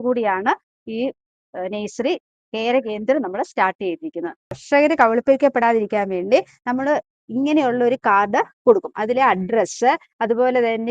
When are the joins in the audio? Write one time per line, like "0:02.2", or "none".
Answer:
0:04.6

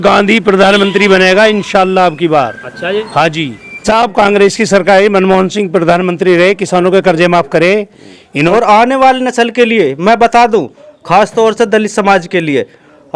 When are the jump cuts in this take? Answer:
0:03.8
0:08.5

